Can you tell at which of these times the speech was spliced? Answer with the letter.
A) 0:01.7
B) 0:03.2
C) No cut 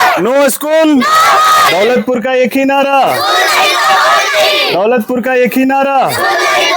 A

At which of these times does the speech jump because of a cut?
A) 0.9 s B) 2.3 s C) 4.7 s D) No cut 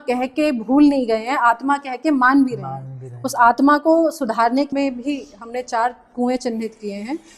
C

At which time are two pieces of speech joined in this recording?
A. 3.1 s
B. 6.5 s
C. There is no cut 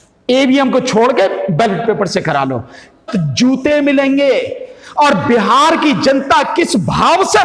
A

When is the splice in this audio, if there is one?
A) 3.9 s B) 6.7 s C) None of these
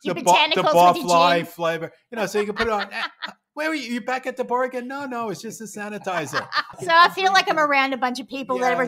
B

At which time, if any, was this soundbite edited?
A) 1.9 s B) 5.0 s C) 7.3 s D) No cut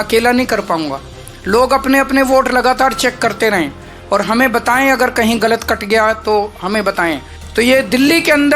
C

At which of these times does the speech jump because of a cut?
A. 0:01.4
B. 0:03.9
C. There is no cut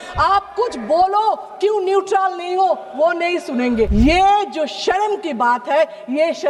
B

